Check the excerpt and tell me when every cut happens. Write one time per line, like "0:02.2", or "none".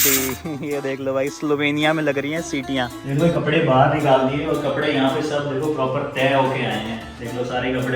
0:03.0